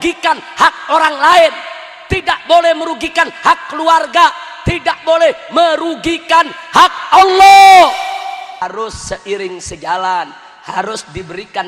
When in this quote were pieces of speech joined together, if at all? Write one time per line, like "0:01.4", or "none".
0:08.6